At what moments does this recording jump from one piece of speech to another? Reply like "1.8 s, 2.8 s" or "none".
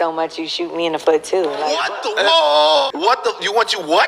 1.7 s, 2.9 s